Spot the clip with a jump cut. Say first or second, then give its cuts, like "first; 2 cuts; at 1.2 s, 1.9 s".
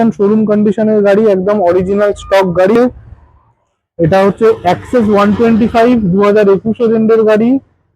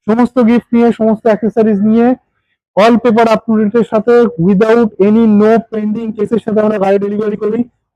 first; 1 cut; at 2.8 s